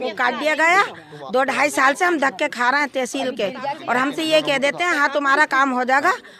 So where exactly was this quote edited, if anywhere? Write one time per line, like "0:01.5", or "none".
none